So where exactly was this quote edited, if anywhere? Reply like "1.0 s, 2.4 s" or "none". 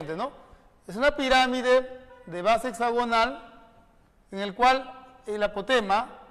3.7 s